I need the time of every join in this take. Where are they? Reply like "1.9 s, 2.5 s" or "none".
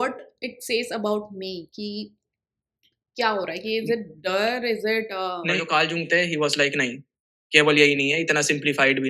5.7 s